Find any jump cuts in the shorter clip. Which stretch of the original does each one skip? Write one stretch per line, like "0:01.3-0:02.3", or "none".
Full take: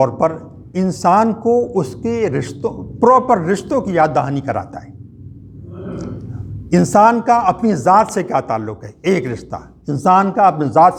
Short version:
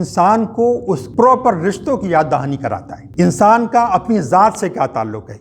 0:01.9-0:02.9
0:04.8-0:06.5